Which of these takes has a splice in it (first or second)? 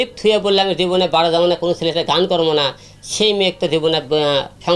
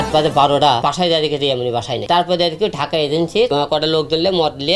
second